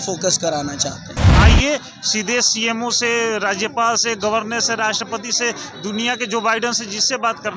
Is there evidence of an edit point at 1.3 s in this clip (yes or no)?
yes